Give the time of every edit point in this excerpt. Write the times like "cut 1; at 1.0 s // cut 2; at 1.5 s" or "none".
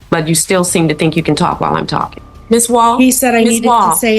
cut 1; at 2.3 s